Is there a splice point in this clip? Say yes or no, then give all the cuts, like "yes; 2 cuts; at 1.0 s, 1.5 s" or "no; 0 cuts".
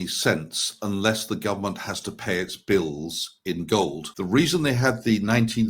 yes; 1 cut; at 4.1 s